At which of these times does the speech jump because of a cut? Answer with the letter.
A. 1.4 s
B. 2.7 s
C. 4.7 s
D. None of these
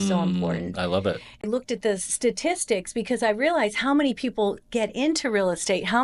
A